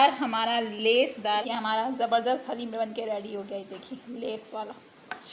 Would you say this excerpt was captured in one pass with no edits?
no; 1 cut; at 1.4 s

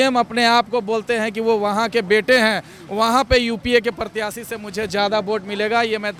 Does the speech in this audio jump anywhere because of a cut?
no; 0 cuts

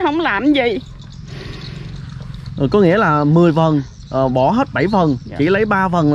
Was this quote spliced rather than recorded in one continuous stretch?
no; 0 cuts

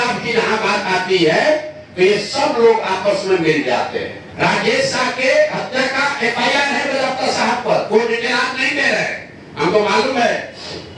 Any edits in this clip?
yes; 1 cut; at 4.2 s

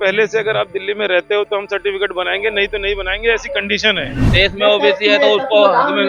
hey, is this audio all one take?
no; 1 cut; at 4.3 s

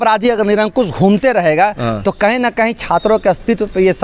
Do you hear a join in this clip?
no; 0 cuts

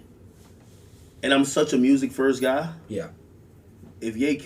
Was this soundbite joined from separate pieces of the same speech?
yes; 1 cut; at 2.0 s

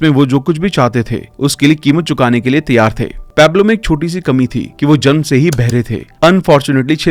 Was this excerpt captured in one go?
yes; 0 cuts

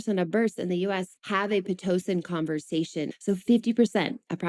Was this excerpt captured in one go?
no; 2 cuts; at 1.1 s, 3.1 s

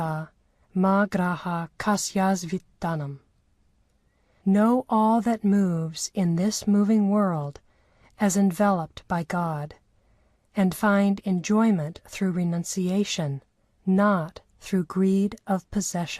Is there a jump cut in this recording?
yes; 1 cut; at 11.7 s

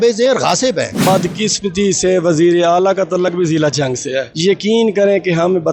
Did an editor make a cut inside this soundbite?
yes; 2 cuts; at 1.0 s, 4.3 s

